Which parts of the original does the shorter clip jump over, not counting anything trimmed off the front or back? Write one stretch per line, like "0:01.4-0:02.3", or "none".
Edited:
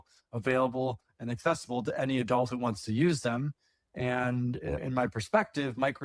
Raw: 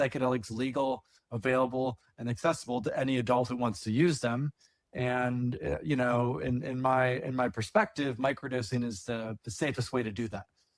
0:05.8-0:07.2